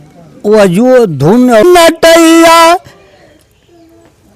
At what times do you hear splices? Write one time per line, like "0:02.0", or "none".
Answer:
0:01.6